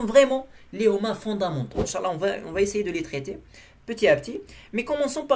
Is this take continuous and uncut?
no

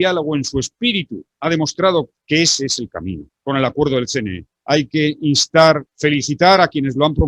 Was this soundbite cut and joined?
yes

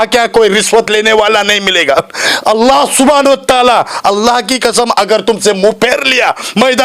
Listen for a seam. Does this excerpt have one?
no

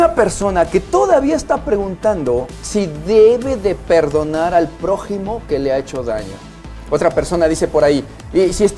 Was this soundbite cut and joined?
yes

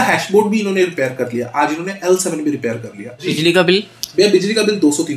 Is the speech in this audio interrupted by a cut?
yes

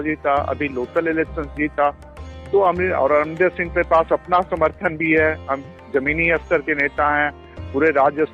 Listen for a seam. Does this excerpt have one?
no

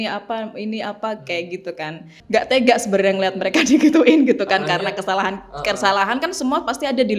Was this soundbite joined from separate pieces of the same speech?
yes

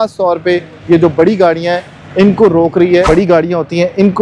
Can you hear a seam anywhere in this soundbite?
yes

